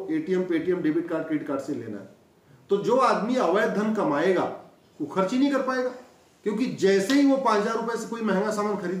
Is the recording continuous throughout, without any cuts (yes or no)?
yes